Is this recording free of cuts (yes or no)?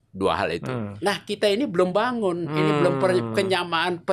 no